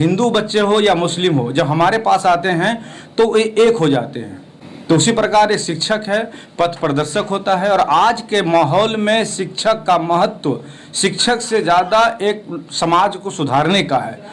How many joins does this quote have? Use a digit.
0